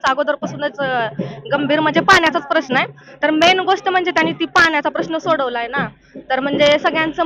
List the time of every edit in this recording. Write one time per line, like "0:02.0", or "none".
none

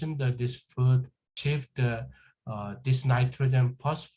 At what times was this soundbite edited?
0:01.3

